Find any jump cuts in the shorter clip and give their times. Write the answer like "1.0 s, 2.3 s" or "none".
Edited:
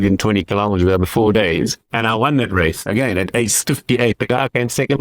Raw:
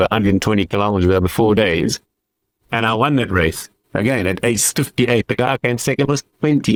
1.8 s, 2.8 s